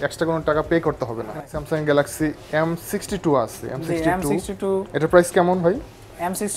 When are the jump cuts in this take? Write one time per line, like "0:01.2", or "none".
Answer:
none